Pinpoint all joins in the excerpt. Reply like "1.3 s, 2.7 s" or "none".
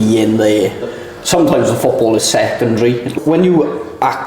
0.9 s, 3.1 s